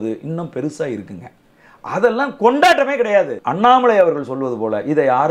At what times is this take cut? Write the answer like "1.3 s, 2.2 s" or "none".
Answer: 3.4 s